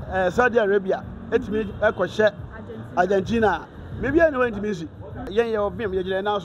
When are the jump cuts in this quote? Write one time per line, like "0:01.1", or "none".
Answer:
0:05.3